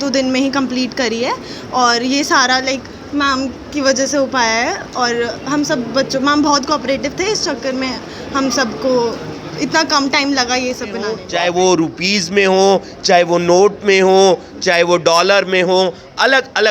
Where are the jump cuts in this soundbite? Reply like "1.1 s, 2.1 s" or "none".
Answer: 11.2 s